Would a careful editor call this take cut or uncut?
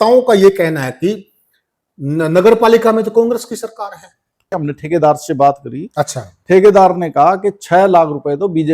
cut